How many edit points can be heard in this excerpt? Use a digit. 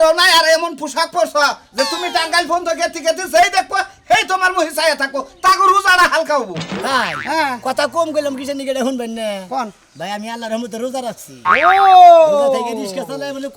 1